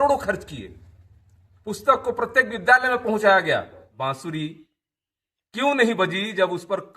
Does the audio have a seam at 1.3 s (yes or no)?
no